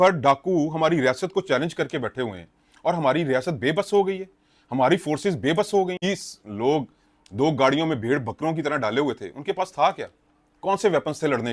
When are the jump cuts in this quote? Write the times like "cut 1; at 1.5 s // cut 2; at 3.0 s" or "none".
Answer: cut 1; at 6.0 s